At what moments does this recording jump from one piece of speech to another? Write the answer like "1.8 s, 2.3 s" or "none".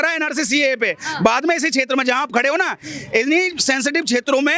none